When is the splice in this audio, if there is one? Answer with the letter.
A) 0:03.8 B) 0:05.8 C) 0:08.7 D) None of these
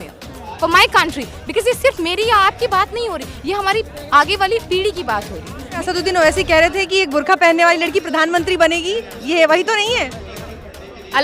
B